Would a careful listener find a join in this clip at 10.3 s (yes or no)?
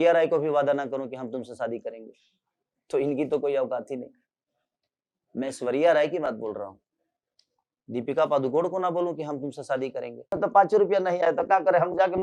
yes